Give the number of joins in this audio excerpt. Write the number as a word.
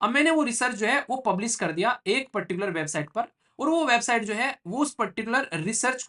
zero